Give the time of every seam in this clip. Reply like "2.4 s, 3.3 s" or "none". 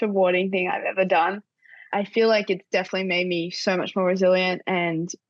1.8 s

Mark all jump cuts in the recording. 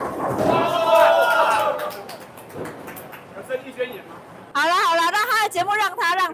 none

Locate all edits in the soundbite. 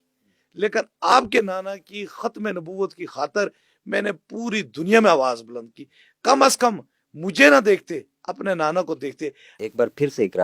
1.1 s, 9.5 s

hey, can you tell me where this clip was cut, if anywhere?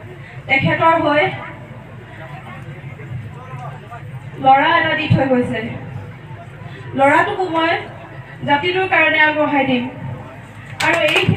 none

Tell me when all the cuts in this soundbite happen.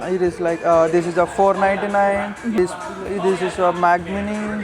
2.5 s

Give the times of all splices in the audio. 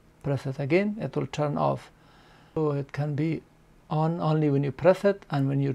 2.3 s

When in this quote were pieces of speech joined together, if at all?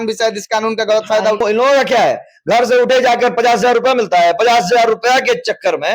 1.4 s

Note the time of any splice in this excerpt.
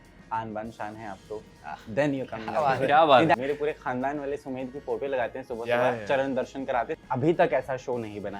3.3 s, 7.0 s

